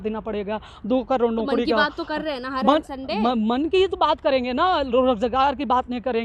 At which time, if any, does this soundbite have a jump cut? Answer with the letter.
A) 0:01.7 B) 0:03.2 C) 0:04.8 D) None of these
D